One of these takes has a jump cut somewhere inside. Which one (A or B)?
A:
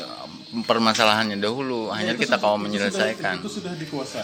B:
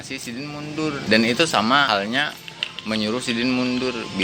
B